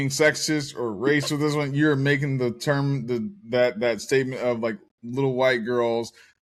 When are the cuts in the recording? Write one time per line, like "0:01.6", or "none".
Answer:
none